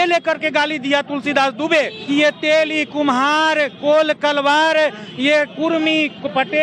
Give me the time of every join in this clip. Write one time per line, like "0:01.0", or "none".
0:02.0